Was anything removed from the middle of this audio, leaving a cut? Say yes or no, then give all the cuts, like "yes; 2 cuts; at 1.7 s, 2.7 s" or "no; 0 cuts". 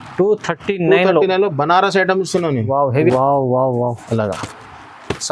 yes; 1 cut; at 3.1 s